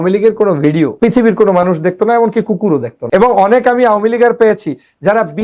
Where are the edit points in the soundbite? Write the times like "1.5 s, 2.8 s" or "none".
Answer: 0.9 s, 3.0 s